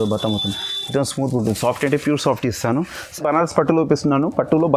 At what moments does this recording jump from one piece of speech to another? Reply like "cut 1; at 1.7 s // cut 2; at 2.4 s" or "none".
cut 1; at 3.0 s